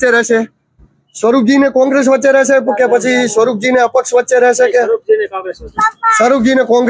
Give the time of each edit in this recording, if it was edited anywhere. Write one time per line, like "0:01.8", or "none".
none